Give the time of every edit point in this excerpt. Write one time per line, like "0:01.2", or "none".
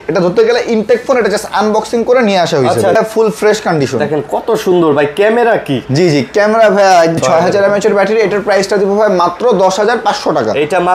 0:03.0
0:07.2

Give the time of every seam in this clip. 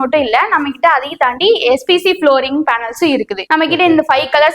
none

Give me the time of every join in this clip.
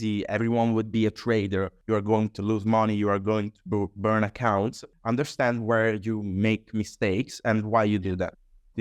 0:01.8
0:04.9

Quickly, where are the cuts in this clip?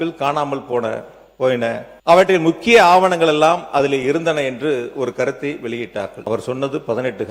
0:01.9
0:06.2

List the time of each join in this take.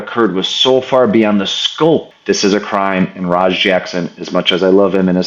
0:02.1

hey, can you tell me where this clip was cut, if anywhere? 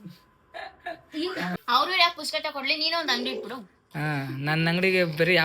0:01.6

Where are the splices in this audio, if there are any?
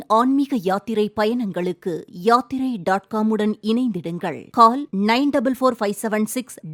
none

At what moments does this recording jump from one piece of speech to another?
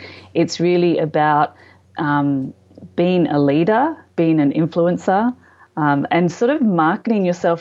none

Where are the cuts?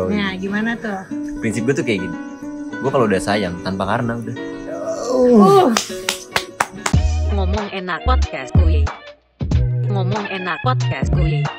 0:06.9

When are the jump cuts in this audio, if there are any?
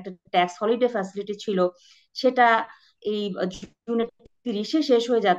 none

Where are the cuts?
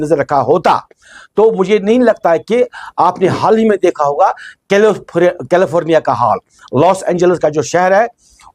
none

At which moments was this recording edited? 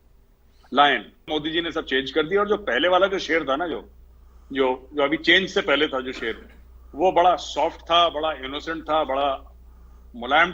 0:01.3

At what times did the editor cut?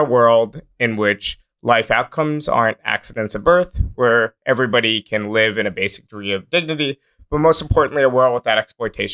none

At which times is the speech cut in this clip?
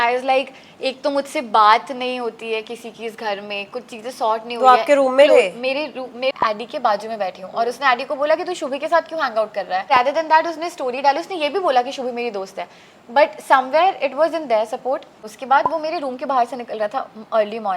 0:06.3
0:09.9
0:15.3

